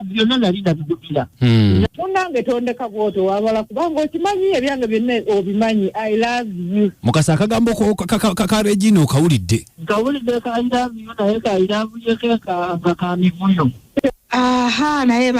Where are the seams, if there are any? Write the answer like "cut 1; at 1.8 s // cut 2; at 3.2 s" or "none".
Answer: cut 1; at 1.8 s // cut 2; at 14.0 s